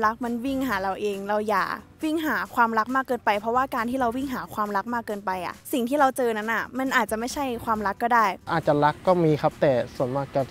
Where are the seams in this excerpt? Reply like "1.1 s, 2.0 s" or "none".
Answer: 8.4 s